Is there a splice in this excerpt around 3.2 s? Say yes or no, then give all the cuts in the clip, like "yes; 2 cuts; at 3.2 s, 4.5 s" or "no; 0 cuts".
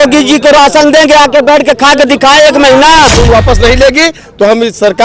yes; 1 cut; at 3.2 s